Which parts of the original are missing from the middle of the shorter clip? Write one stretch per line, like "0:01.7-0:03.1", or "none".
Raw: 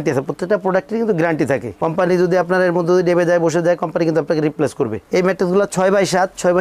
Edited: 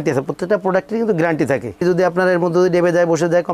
0:01.8-0:02.2